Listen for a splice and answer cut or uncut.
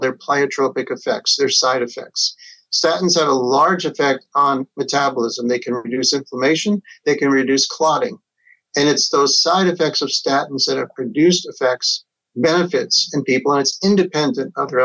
uncut